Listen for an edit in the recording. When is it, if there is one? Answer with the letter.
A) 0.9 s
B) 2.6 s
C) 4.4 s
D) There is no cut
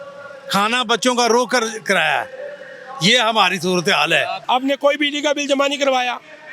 C